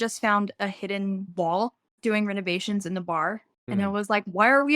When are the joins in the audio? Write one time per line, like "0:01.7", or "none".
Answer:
0:01.3
0:03.6